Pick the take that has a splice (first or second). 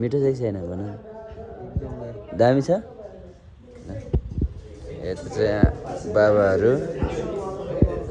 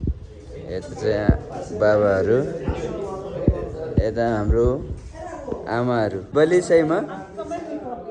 second